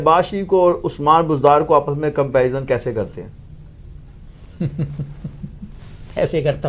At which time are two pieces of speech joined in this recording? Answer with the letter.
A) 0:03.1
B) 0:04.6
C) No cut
C